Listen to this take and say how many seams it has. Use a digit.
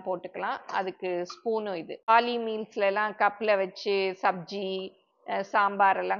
1